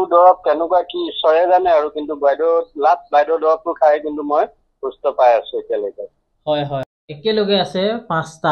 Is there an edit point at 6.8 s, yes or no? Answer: yes